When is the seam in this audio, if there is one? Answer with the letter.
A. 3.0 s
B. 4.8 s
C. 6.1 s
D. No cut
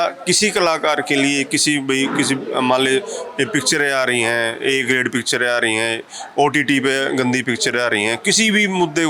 D